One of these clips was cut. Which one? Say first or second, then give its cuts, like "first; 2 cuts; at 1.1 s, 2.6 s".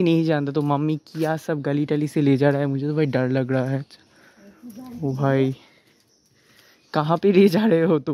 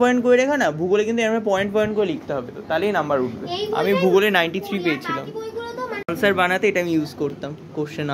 second; 1 cut; at 6.0 s